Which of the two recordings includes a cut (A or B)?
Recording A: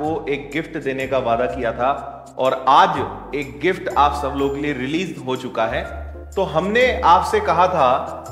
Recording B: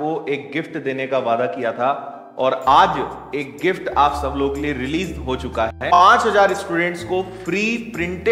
B